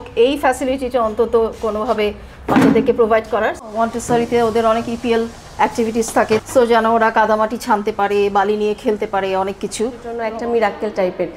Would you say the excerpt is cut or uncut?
cut